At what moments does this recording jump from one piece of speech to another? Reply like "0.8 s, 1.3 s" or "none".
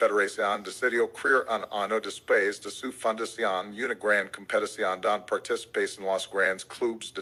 none